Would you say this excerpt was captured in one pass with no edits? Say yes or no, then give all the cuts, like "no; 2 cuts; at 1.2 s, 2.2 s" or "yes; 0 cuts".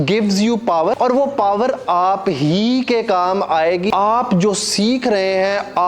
no; 2 cuts; at 1.0 s, 3.9 s